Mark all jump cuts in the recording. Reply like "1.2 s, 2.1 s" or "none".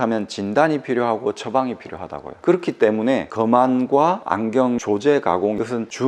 none